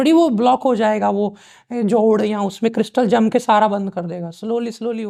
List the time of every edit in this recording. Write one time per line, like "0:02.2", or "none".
none